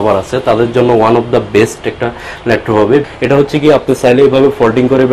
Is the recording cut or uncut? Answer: cut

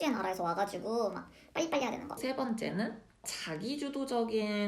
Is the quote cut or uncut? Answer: cut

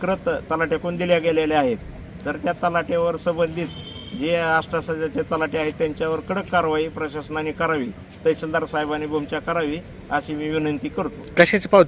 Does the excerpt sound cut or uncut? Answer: uncut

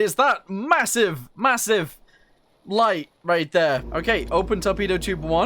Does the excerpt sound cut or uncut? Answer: cut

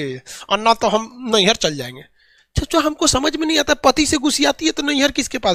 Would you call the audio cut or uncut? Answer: uncut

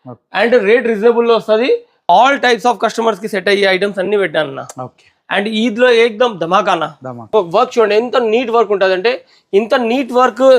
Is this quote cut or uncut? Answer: cut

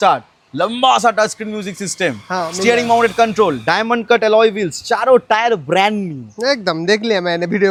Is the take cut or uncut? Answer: uncut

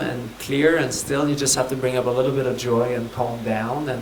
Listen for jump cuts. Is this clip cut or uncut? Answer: uncut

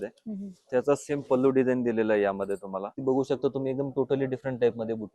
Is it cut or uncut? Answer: cut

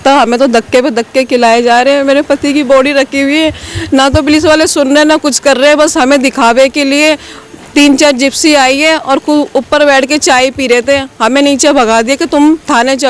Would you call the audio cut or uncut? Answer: uncut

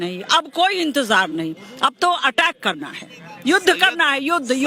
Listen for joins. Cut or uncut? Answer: uncut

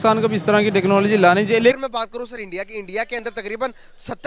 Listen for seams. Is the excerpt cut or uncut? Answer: cut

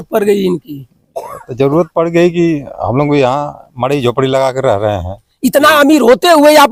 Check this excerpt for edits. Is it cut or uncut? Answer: uncut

